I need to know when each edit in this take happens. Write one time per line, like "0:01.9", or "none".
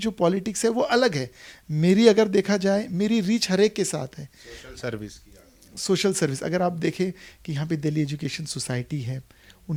none